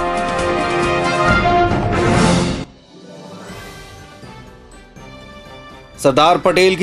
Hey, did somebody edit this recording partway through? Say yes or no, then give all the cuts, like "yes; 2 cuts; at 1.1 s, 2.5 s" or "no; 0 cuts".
no; 0 cuts